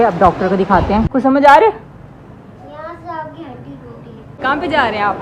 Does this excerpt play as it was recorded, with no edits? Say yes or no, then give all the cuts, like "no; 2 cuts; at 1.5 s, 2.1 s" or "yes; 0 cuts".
no; 2 cuts; at 1.1 s, 4.4 s